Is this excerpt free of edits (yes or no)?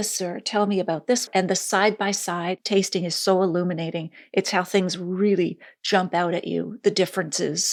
yes